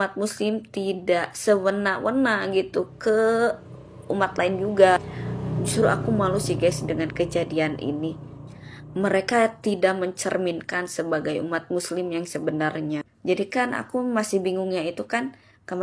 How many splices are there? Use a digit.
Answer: 0